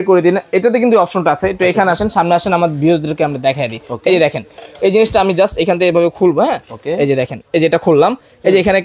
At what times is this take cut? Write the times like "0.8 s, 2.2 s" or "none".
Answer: none